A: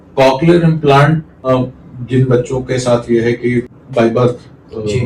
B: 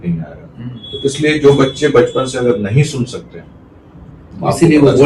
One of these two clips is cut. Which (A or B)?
A